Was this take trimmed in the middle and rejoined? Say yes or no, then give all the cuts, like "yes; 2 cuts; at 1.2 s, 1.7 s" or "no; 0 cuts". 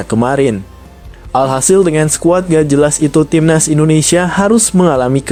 no; 0 cuts